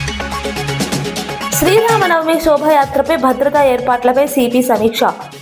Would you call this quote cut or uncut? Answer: cut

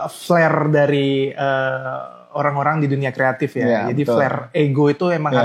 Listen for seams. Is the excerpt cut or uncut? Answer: uncut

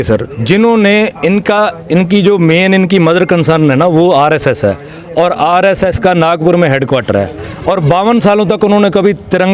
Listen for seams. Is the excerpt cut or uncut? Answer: uncut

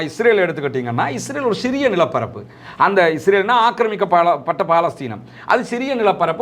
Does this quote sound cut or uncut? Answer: uncut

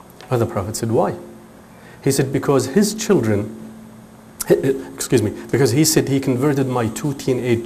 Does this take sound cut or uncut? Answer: uncut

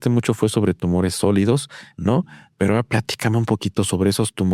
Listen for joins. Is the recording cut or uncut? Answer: uncut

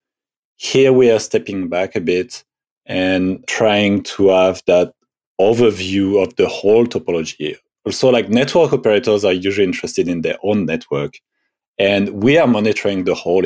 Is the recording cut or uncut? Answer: cut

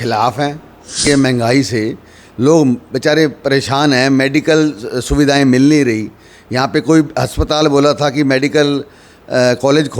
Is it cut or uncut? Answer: cut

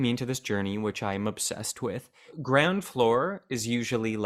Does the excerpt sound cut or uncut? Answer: cut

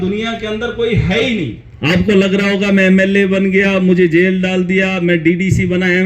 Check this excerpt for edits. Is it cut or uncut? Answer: cut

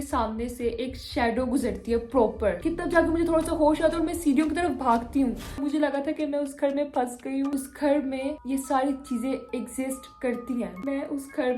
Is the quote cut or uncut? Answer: cut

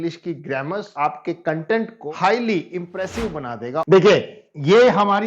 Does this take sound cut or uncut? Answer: cut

